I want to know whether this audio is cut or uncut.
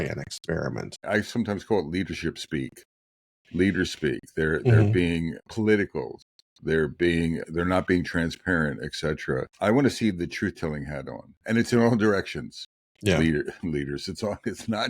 cut